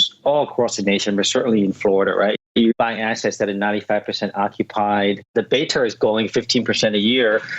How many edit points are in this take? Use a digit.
2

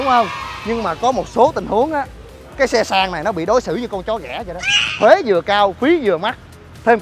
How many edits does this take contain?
1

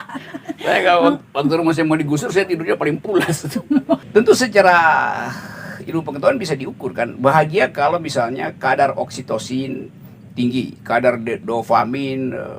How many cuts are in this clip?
1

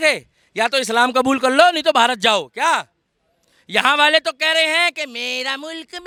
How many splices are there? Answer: 0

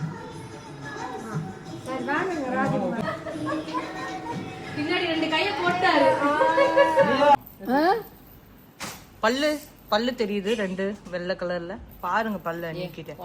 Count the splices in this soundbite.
2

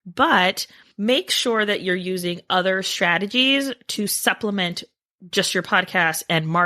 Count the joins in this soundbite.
0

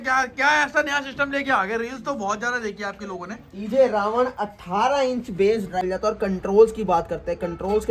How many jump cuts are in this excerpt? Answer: 1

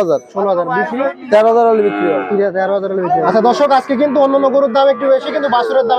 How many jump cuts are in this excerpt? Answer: 1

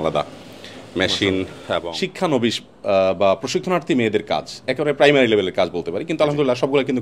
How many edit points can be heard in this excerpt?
1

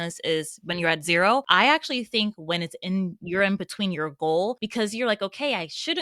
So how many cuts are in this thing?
2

